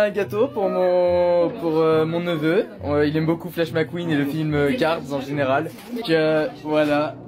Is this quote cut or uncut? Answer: uncut